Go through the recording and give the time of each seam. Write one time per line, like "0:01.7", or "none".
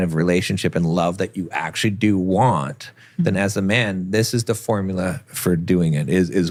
none